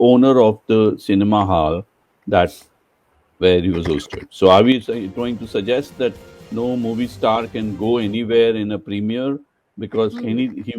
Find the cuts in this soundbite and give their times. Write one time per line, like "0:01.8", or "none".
none